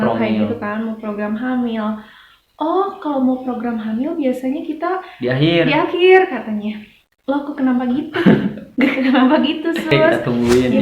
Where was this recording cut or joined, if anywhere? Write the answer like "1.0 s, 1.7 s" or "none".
9.9 s